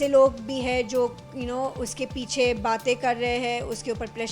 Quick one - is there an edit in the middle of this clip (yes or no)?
no